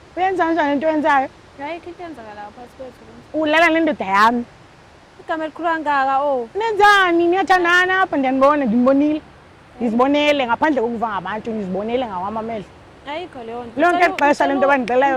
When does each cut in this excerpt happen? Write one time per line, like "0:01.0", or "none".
none